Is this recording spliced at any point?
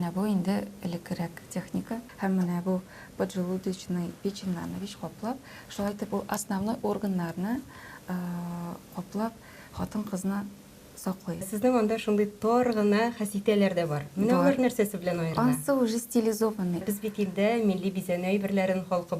yes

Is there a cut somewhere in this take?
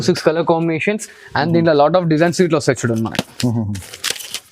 no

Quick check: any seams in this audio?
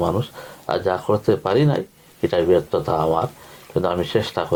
no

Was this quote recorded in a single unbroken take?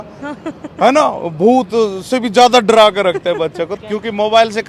no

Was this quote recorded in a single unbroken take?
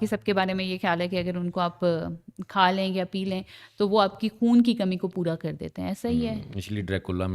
yes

